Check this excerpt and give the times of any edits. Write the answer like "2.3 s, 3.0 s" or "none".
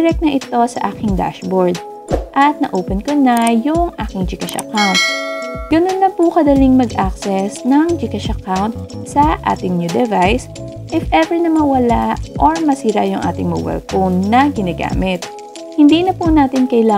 5.6 s